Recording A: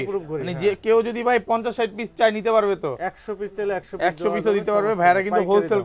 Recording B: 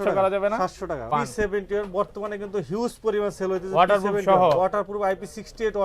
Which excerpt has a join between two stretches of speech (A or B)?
B